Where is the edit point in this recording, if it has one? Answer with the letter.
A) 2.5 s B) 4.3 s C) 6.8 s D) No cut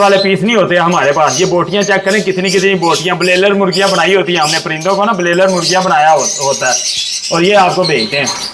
D